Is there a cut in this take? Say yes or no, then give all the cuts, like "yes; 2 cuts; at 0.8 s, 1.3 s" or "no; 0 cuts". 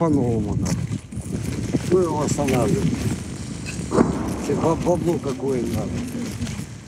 no; 0 cuts